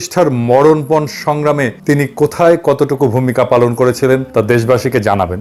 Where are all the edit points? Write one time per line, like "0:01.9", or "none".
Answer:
0:01.8
0:04.3